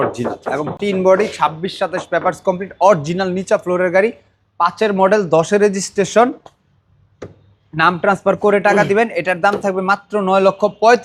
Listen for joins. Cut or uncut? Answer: uncut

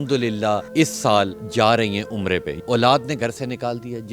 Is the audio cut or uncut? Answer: cut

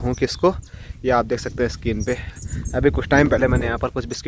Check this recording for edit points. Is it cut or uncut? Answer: uncut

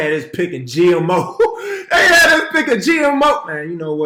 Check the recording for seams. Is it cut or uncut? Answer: uncut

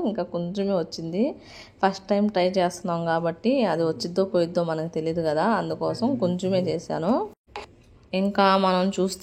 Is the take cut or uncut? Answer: uncut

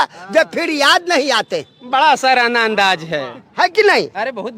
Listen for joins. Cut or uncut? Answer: uncut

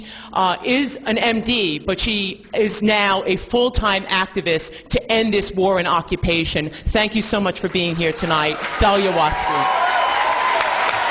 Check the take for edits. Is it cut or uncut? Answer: cut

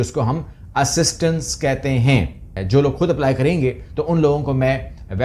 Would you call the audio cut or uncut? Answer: cut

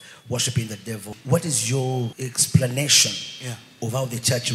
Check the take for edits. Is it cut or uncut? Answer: cut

